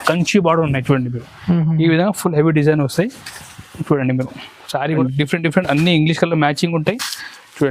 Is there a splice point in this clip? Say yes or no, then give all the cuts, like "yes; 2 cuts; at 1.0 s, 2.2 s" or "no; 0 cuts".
yes; 1 cut; at 5.0 s